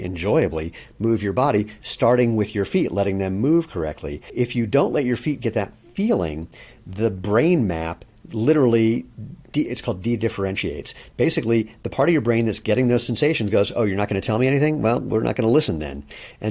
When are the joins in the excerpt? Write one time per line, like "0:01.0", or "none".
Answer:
0:04.3